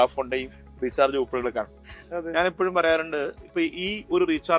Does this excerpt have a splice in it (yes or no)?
no